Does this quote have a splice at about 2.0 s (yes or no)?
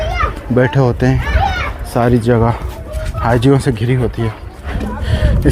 no